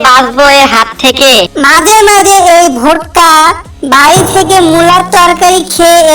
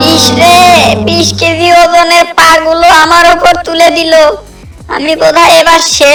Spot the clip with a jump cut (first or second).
first